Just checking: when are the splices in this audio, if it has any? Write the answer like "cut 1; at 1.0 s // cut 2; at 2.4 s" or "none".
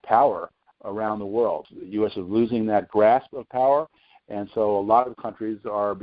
cut 1; at 1.7 s

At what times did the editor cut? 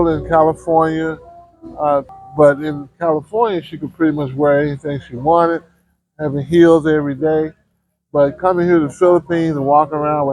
cut 1; at 2.1 s

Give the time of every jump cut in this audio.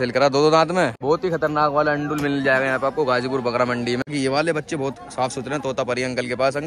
cut 1; at 1.0 s // cut 2; at 4.0 s

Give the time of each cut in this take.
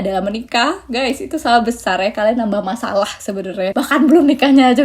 cut 1; at 3.7 s

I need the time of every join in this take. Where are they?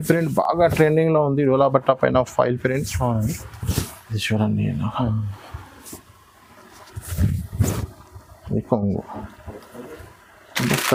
none

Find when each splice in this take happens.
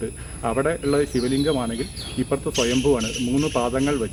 none

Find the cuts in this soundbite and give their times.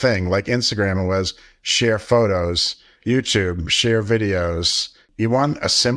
cut 1; at 5.0 s

